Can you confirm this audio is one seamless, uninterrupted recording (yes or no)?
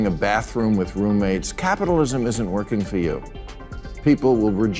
yes